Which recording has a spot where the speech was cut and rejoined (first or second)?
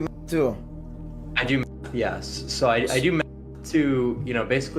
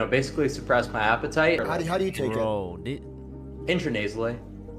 second